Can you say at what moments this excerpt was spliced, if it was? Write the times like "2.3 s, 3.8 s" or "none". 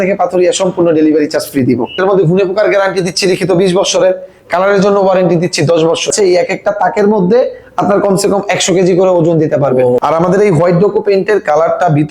2.0 s, 6.1 s, 10.0 s